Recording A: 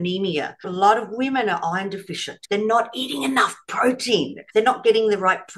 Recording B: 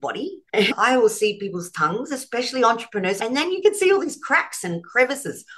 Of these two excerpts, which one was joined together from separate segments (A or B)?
B